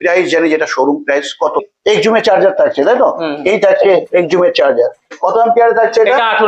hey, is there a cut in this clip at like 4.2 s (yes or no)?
no